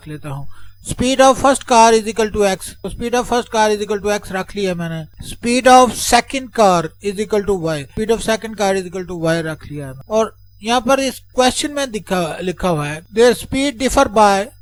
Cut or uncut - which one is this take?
uncut